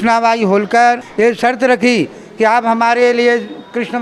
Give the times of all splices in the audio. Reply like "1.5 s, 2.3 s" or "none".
1.1 s